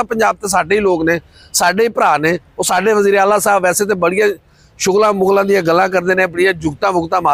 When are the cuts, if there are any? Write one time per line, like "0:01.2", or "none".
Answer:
none

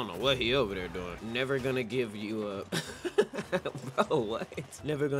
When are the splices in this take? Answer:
0:01.2
0:02.7

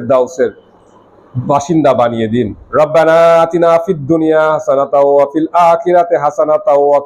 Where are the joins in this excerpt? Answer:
0:02.6

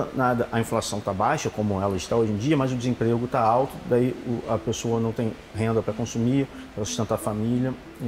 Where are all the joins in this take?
none

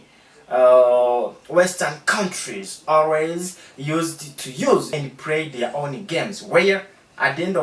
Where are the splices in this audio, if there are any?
0:04.9

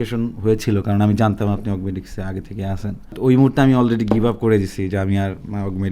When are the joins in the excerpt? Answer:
0:03.1

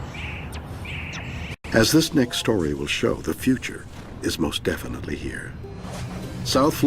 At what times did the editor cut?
0:02.7

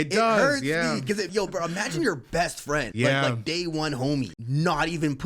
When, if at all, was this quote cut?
0:01.3
0:02.9
0:04.4

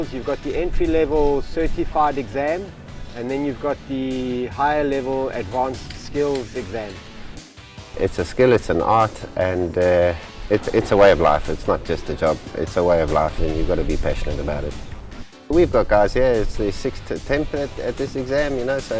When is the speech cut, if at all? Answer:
0:07.5
0:10.3
0:13.4
0:15.3

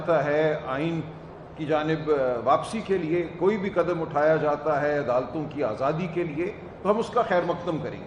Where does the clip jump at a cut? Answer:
none

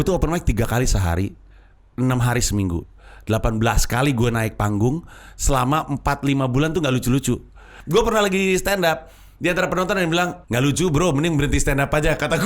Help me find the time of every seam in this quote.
0:07.7
0:10.4

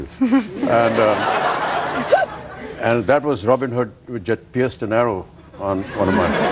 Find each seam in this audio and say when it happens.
0:02.2

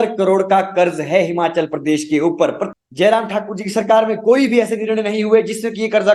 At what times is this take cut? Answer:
0:02.7

